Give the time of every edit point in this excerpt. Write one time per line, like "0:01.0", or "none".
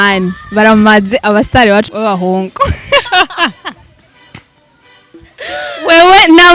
0:01.9